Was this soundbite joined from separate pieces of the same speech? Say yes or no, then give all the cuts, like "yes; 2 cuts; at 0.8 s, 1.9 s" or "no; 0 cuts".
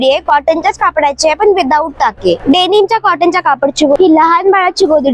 yes; 2 cuts; at 2.4 s, 4.0 s